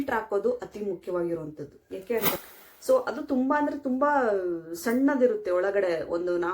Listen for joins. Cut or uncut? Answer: cut